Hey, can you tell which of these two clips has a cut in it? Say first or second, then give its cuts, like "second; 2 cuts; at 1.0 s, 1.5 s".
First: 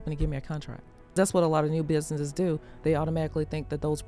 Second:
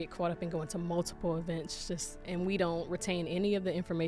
first; 1 cut; at 1.2 s